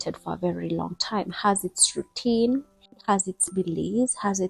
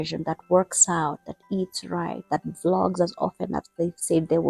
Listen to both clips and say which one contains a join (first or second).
first